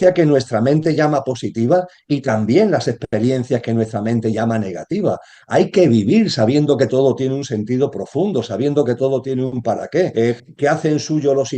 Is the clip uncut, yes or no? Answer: no